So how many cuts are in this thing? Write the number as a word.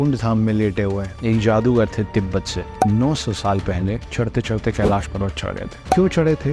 two